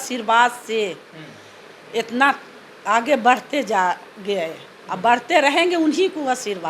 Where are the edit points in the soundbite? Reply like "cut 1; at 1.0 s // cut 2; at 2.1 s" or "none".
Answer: none